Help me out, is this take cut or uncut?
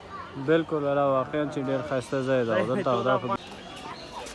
cut